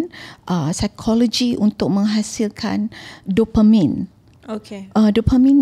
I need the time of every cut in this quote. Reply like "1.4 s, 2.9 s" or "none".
none